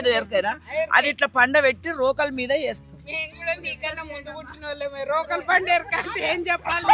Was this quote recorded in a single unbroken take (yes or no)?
yes